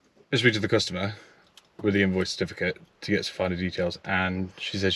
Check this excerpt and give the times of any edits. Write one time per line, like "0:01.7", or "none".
none